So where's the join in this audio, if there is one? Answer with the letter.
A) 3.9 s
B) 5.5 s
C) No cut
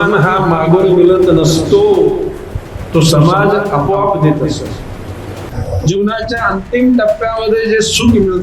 B